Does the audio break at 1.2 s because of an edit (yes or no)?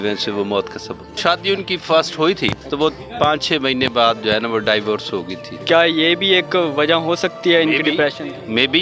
yes